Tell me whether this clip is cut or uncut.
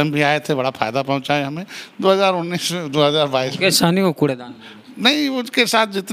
uncut